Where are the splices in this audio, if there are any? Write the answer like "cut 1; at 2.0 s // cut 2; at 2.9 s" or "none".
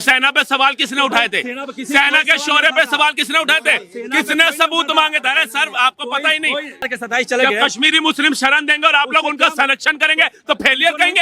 cut 1; at 6.8 s